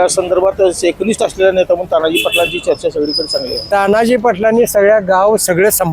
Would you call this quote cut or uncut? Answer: cut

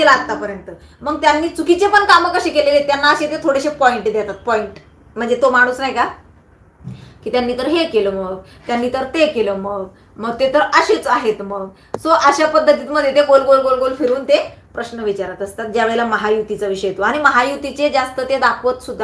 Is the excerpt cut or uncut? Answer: uncut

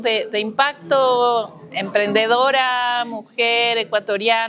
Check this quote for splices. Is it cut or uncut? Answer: uncut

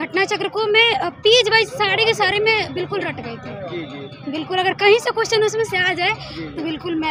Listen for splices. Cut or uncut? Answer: uncut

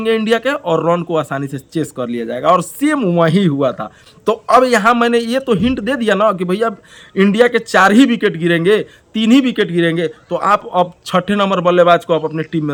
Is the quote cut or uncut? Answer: uncut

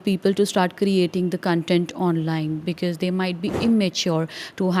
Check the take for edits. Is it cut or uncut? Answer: uncut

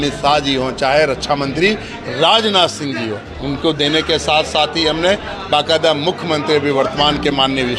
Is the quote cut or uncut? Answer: uncut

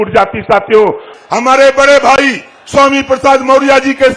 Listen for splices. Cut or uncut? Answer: cut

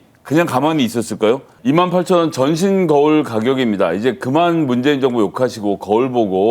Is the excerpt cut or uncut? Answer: cut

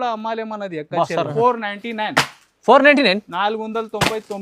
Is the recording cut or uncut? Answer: cut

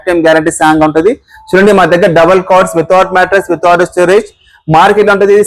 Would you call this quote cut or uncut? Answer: uncut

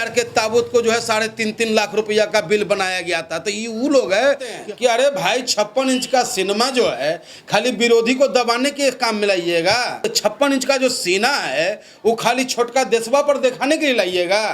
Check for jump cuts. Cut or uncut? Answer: cut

